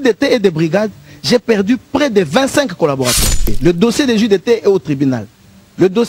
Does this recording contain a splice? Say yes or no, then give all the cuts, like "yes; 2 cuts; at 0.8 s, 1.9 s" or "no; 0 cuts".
yes; 1 cut; at 3.5 s